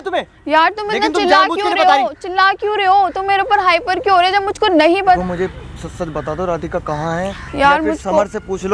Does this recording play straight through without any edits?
no; 1 cut; at 5.2 s

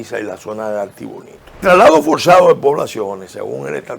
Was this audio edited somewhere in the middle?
yes; 1 cut; at 1.6 s

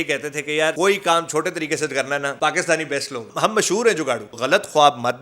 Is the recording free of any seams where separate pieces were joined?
no; 4 cuts; at 0.8 s, 2.3 s, 3.3 s, 4.3 s

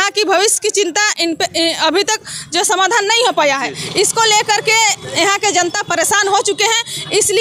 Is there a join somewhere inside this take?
no; 0 cuts

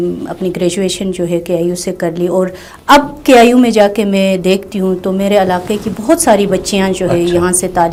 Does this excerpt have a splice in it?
no; 0 cuts

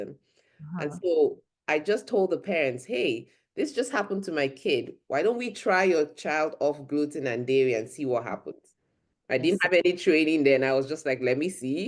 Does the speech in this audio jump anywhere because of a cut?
no; 0 cuts

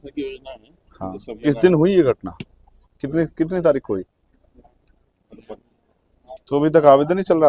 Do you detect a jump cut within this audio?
yes; 2 cuts; at 1.5 s, 6.1 s

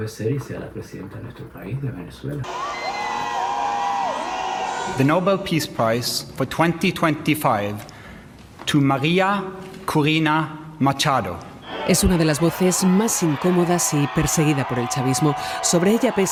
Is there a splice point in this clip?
no; 0 cuts

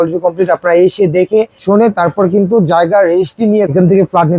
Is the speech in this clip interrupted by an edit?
yes; 2 cuts; at 1.6 s, 3.7 s

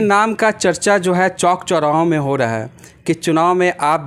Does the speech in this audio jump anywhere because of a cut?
no; 0 cuts

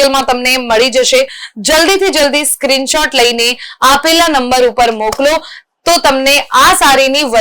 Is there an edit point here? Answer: no; 0 cuts

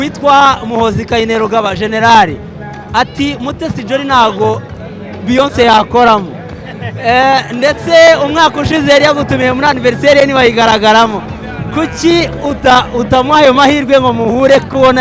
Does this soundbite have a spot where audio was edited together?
no; 0 cuts

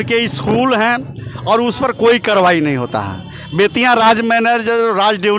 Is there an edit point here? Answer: no; 0 cuts

